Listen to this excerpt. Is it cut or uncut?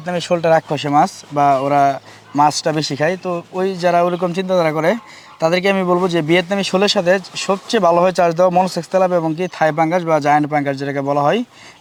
uncut